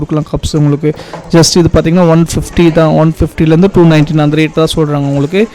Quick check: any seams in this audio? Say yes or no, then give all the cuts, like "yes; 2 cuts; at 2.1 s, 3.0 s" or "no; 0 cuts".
no; 0 cuts